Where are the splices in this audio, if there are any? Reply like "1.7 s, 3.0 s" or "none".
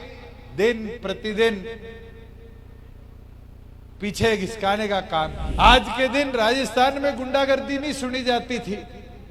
5.4 s